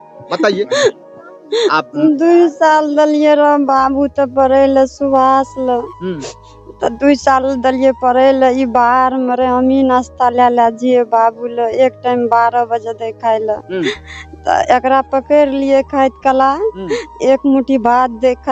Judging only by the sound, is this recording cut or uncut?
uncut